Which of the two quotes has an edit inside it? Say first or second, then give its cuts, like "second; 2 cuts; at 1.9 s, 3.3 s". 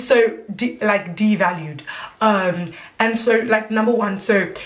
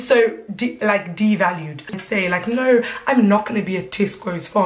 second; 1 cut; at 2.0 s